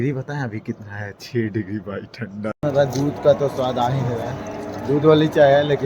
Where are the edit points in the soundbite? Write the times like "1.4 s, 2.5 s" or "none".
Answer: 2.6 s